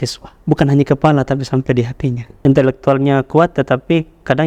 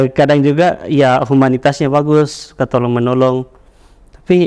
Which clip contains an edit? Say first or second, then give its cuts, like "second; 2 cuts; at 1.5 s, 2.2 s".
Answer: first; 1 cut; at 2.3 s